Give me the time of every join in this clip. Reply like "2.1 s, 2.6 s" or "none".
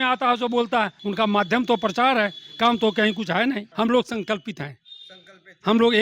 1.0 s, 3.7 s